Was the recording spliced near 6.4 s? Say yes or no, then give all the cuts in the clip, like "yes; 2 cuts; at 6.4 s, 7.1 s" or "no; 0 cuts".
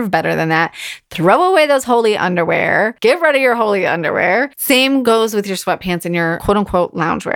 yes; 3 cuts; at 2.9 s, 5.0 s, 6.4 s